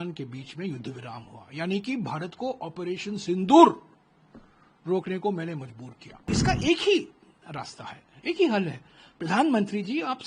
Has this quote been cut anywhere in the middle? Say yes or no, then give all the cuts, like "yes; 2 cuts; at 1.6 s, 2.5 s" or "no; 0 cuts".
yes; 1 cut; at 6.3 s